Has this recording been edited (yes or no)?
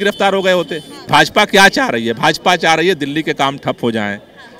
yes